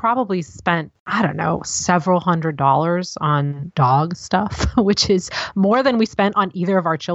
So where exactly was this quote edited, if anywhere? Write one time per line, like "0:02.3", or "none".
0:01.0
0:03.6